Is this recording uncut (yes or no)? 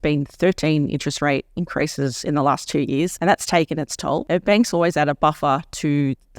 no